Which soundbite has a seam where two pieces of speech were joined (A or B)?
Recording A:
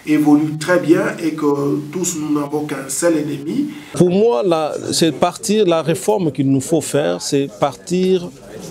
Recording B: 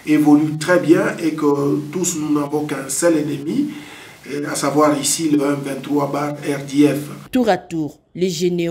A